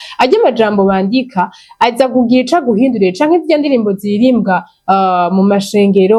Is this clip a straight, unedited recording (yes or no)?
yes